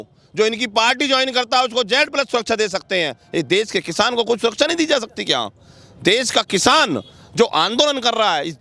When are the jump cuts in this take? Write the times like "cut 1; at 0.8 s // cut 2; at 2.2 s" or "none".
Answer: none